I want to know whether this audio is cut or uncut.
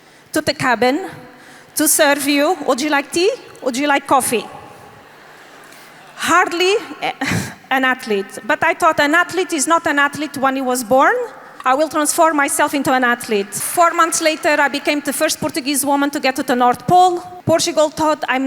cut